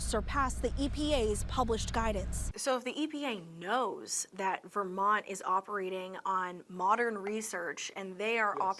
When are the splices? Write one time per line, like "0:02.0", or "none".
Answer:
0:02.4

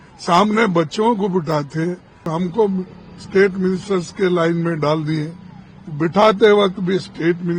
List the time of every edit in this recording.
0:02.3

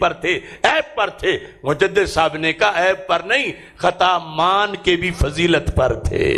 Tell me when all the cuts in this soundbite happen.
none

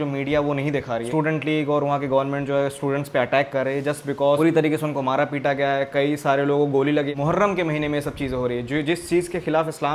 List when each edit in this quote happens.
0:01.1
0:04.4
0:07.1

